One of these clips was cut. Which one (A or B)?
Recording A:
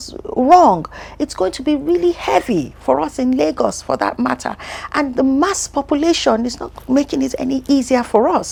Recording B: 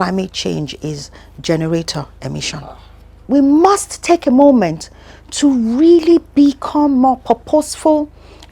B